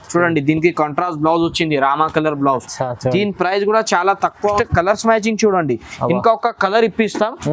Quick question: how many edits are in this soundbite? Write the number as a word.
one